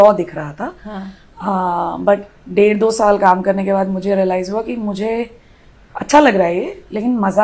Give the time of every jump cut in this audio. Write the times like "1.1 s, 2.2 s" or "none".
none